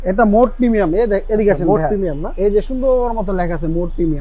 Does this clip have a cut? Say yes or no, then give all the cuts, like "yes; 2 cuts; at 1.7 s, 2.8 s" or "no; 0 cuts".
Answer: no; 0 cuts